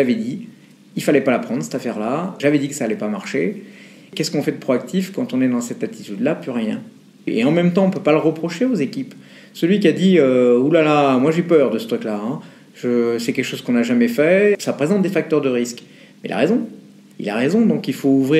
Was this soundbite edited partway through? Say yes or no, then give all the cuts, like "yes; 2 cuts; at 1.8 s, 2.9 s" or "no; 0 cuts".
yes; 2 cuts; at 7.3 s, 14.6 s